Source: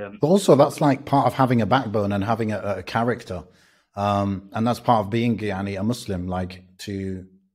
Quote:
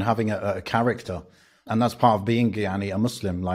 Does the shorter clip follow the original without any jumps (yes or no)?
no